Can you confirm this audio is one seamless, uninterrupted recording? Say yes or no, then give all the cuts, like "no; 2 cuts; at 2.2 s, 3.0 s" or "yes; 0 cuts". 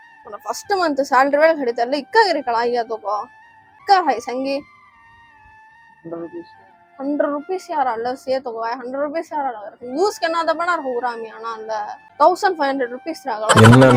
no; 2 cuts; at 3.8 s, 12.0 s